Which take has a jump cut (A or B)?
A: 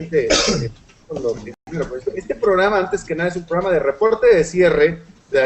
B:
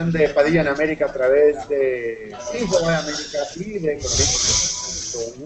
A